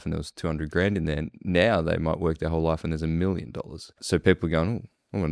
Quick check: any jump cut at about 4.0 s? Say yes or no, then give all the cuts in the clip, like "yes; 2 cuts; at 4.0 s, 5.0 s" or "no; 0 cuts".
yes; 1 cut; at 4.0 s